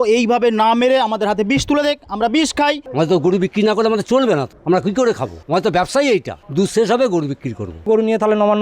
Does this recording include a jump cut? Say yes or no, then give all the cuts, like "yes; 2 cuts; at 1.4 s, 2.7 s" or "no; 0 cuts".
yes; 5 cuts; at 2.8 s, 4.5 s, 5.3 s, 6.4 s, 7.9 s